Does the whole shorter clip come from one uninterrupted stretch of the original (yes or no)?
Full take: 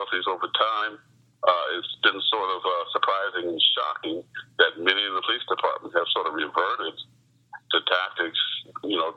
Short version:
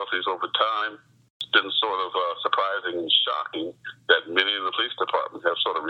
no